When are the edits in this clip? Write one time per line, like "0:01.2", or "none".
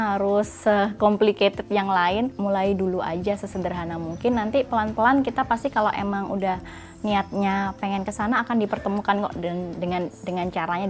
0:02.3